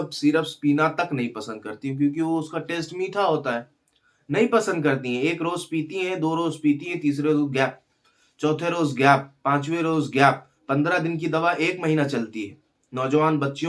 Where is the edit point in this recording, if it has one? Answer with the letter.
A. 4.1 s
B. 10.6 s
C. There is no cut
C